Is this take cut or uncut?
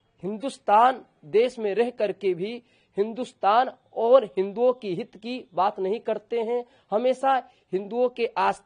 uncut